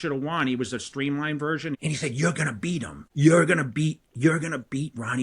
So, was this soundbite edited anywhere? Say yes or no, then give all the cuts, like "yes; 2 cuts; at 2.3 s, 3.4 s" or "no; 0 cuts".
yes; 2 cuts; at 1.8 s, 3.0 s